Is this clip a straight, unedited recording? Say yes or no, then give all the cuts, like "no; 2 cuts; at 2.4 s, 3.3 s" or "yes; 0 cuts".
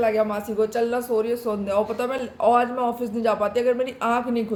yes; 0 cuts